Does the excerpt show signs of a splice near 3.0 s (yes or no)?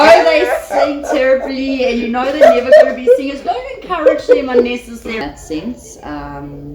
no